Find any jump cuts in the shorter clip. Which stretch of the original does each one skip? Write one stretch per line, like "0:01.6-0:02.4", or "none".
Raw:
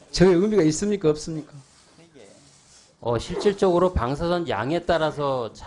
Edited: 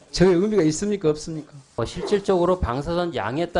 0:01.8-0:03.1